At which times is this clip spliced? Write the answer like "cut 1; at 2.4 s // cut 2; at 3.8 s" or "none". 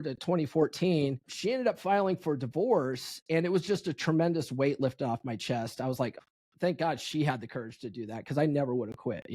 cut 1; at 1.3 s // cut 2; at 6.2 s